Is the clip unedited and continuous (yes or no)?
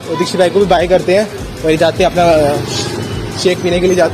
yes